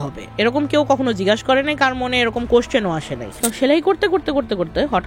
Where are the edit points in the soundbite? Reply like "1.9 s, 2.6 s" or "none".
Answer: 3.4 s